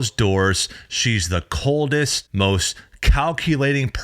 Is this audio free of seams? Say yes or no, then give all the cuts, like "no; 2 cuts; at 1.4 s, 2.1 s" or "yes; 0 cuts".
no; 1 cut; at 2.2 s